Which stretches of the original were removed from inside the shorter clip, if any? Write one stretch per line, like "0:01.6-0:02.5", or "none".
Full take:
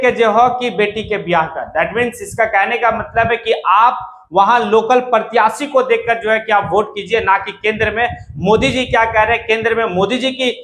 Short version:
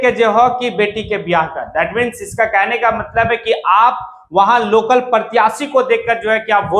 none